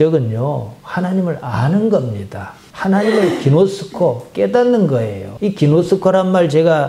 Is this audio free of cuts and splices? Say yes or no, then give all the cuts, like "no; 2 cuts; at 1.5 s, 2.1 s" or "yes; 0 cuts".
yes; 0 cuts